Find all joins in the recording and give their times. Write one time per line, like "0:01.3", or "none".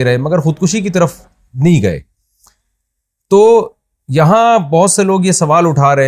none